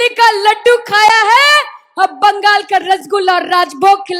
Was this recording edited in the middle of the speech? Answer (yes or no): no